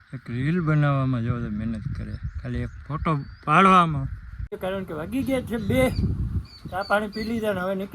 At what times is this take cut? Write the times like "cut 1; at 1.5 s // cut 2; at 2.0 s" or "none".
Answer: cut 1; at 4.6 s